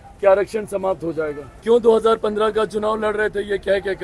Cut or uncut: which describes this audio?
cut